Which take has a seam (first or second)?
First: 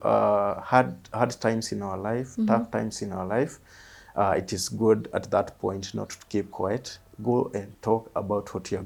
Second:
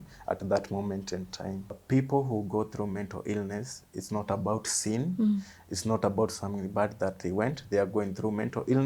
second